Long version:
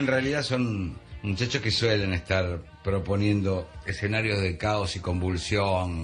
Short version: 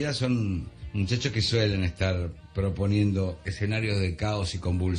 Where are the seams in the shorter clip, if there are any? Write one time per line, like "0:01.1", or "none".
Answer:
0:03.4